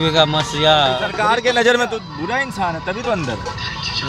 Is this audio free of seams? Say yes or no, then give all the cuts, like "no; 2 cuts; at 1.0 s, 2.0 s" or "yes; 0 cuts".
no; 1 cut; at 1.1 s